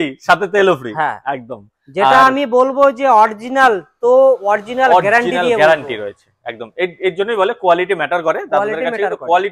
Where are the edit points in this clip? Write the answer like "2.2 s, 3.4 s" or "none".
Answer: none

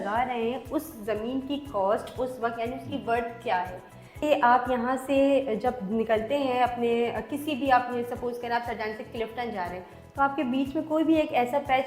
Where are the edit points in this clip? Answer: 4.2 s

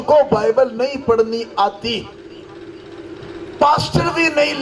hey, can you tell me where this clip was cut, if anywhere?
none

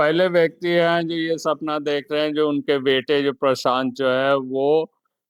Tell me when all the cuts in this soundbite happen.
none

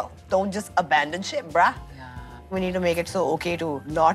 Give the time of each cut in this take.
2.4 s

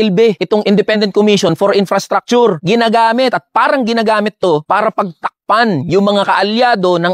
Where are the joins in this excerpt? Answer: none

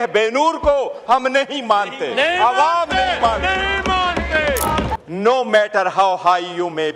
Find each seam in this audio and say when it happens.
4.9 s

